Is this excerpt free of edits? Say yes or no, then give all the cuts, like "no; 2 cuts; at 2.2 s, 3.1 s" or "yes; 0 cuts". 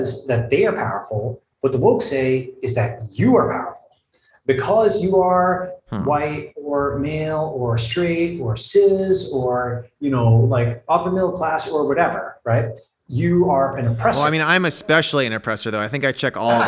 no; 1 cut; at 14.2 s